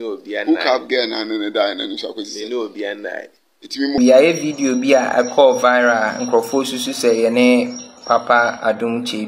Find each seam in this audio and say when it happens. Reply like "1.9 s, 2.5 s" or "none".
4.0 s